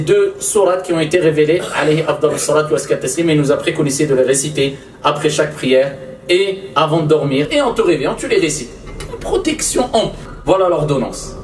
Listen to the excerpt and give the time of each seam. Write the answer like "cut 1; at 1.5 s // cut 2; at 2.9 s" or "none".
cut 1; at 7.5 s // cut 2; at 10.2 s

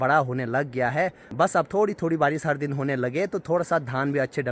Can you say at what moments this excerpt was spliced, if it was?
none

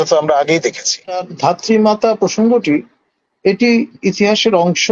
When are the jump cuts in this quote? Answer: cut 1; at 1.3 s

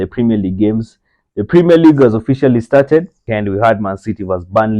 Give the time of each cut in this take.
cut 1; at 3.2 s

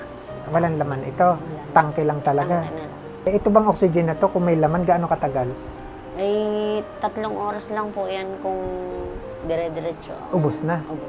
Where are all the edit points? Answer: cut 1; at 3.1 s

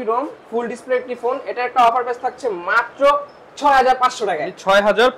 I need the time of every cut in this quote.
none

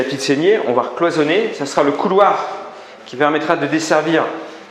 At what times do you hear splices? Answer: none

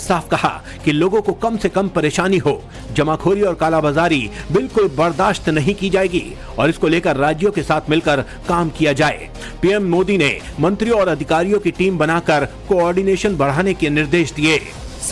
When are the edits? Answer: none

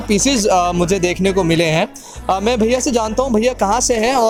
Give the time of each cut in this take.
none

